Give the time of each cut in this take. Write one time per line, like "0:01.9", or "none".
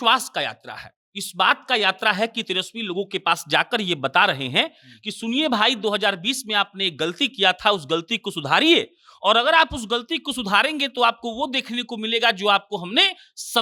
none